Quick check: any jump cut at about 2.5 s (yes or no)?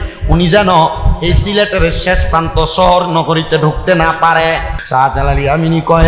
no